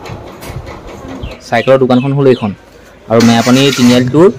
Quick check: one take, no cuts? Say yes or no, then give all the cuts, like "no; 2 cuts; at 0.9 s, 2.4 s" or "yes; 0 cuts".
no; 1 cut; at 1.4 s